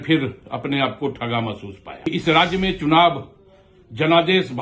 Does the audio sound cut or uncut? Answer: cut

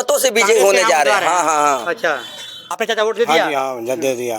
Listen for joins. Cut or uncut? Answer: cut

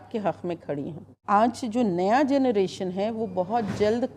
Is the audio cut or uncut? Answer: cut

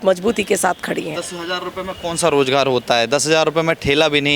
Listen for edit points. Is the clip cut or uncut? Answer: uncut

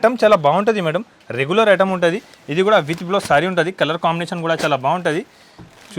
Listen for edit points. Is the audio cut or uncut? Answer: uncut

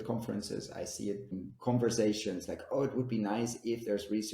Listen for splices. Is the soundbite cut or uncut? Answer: cut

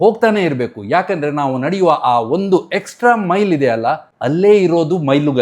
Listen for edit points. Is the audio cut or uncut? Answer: cut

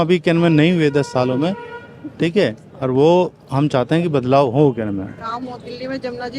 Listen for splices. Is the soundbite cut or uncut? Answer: uncut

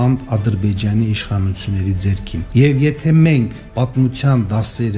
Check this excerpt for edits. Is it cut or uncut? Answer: cut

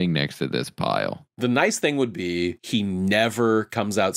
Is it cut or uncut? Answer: cut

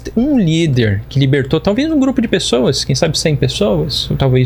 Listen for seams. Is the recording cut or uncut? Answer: uncut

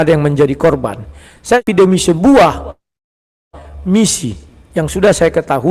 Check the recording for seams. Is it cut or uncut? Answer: cut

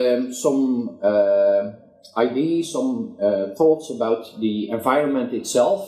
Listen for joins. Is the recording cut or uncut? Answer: uncut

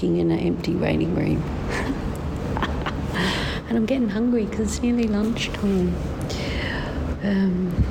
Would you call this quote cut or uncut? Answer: uncut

